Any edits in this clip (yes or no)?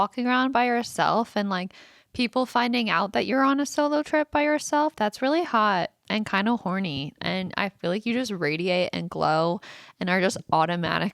no